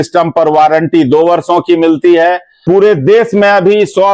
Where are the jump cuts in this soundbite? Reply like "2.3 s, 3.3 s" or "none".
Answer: 2.5 s